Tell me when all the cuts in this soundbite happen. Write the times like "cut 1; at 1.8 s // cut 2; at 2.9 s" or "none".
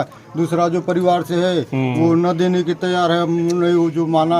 none